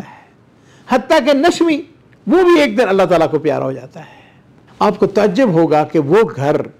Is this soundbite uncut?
yes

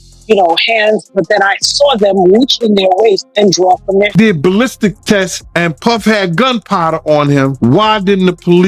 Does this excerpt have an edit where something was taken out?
yes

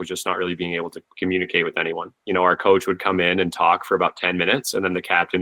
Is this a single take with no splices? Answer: no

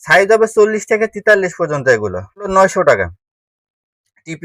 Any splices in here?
yes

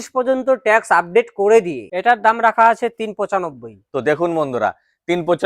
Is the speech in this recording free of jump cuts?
no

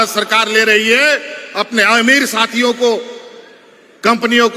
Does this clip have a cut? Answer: no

